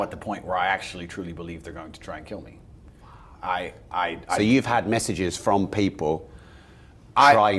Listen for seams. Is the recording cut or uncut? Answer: uncut